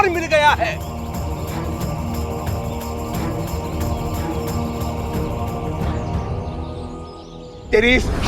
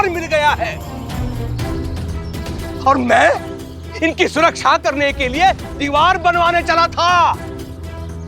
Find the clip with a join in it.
second; 1 cut; at 1.0 s

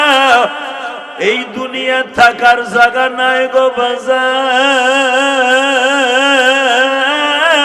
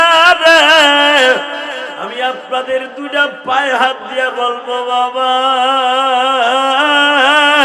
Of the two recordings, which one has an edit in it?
second; 1 cut; at 2.0 s

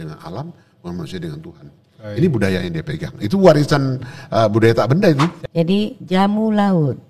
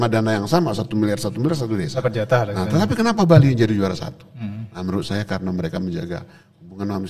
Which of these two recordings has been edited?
first; 1 cut; at 5.4 s

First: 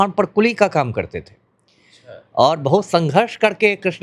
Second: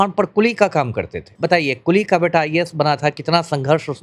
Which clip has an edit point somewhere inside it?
second; 1 cut; at 1.3 s

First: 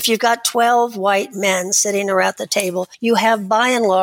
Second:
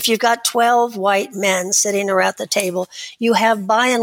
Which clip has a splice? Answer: first; 1 cut; at 2.9 s

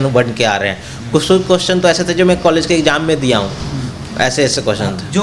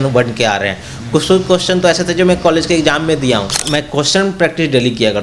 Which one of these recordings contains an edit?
second; 1 cut; at 3.6 s

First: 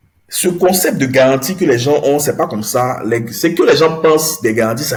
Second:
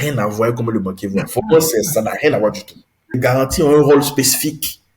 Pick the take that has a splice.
second; 1 cut; at 3.2 s

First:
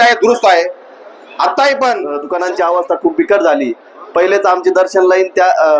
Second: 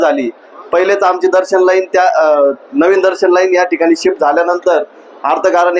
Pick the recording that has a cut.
first; 1 cut; at 2.3 s

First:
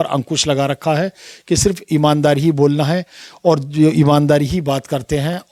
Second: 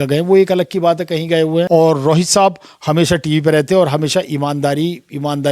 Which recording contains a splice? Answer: second; 1 cut; at 1.7 s

